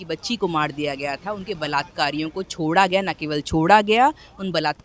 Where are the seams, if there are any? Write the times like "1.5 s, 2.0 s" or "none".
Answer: none